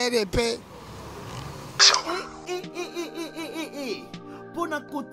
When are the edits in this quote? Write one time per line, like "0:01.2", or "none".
0:01.7